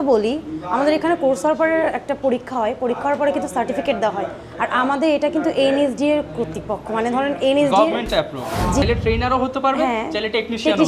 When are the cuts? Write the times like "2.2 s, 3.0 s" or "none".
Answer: 8.8 s